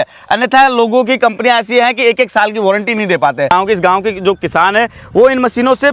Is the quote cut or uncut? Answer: cut